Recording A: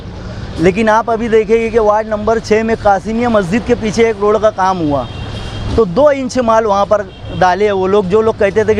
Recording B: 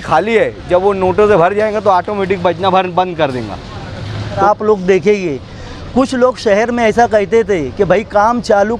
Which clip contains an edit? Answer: B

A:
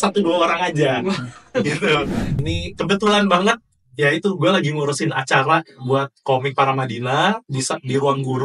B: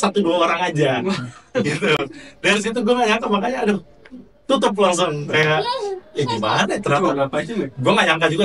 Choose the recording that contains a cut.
A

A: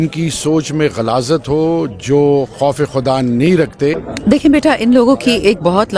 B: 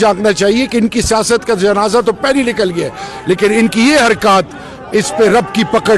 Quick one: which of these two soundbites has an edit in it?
A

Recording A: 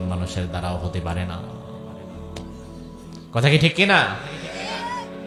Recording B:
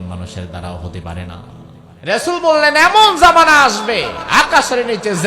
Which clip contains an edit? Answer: B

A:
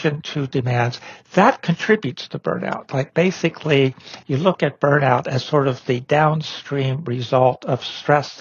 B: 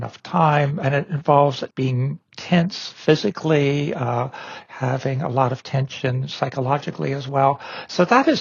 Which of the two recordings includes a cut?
B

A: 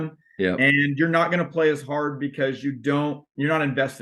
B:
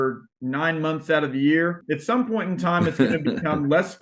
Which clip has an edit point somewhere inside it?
B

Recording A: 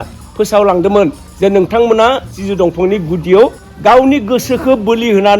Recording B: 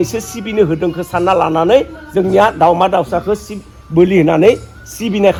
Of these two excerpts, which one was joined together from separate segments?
A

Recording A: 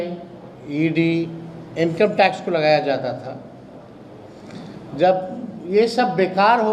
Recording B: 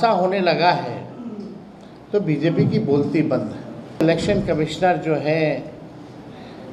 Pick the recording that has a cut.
B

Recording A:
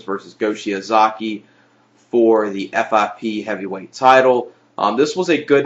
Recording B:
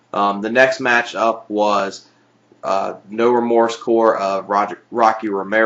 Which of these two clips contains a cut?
B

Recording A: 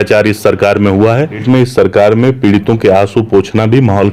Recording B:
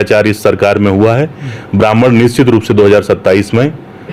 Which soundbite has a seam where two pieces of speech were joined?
A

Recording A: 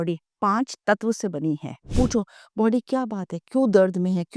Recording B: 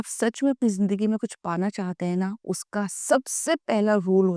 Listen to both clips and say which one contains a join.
A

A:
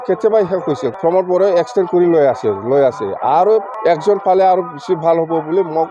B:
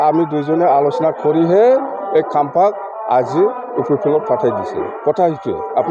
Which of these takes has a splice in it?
A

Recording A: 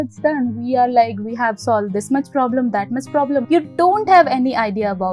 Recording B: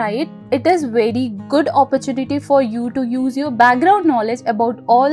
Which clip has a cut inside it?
A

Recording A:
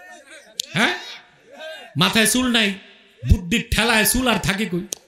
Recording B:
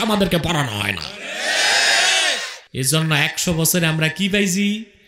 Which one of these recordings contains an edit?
B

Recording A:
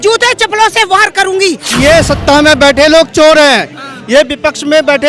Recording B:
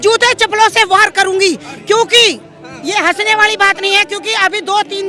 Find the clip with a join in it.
A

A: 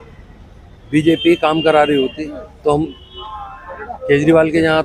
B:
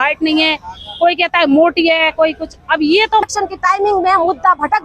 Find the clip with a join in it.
B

